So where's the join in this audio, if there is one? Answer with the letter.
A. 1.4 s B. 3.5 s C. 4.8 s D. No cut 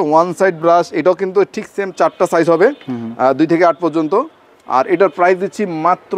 D